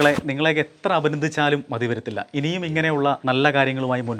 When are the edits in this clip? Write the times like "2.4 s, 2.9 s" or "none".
3.2 s